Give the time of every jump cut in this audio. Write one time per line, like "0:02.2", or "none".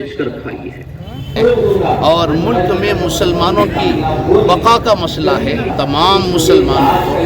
0:01.3
0:05.7